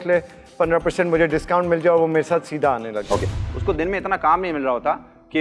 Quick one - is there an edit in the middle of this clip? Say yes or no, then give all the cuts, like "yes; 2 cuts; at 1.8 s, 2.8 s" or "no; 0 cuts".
yes; 1 cut; at 3.4 s